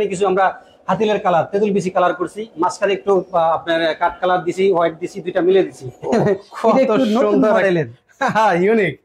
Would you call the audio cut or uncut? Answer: cut